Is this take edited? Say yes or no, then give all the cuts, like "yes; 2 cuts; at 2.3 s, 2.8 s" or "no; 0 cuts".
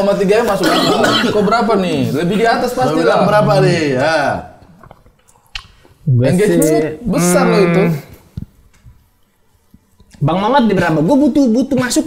no; 0 cuts